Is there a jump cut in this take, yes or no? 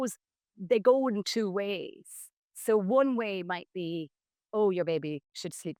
no